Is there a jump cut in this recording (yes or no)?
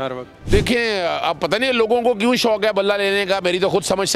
no